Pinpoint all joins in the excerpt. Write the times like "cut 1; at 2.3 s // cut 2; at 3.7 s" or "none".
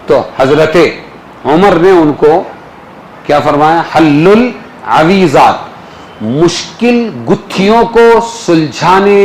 cut 1; at 3.9 s